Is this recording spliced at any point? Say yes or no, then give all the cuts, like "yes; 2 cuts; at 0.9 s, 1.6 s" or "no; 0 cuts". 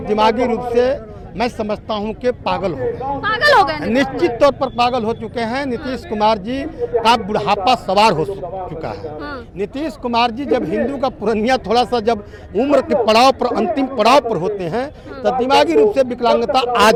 no; 0 cuts